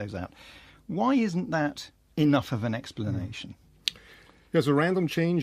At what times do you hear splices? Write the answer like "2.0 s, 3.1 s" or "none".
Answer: 0.9 s